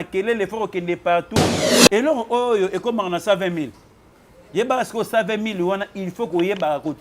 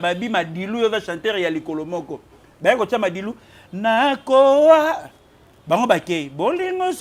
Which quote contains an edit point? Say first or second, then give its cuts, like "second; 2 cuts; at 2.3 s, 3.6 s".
first; 1 cut; at 1.6 s